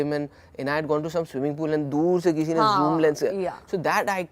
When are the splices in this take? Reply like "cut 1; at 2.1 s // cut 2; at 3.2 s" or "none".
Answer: none